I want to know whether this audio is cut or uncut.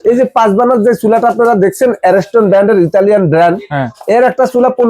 uncut